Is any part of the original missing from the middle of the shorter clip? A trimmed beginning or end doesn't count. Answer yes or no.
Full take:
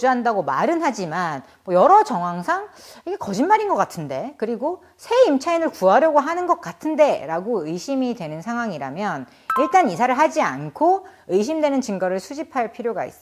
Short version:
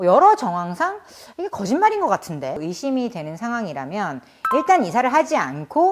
yes